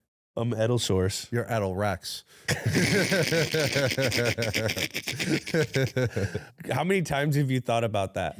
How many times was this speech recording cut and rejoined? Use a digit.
2